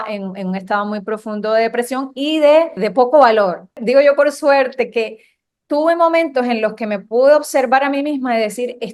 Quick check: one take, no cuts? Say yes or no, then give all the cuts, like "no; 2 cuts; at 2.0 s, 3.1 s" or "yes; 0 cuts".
no; 2 cuts; at 2.8 s, 3.8 s